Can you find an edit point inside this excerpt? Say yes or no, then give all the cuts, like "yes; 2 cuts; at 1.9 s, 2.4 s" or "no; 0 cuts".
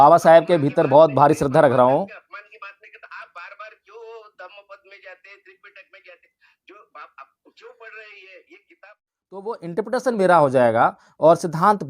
yes; 1 cut; at 9.5 s